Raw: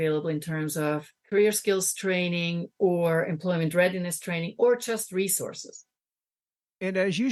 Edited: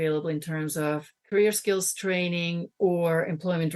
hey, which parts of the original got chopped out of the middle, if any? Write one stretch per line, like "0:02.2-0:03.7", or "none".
none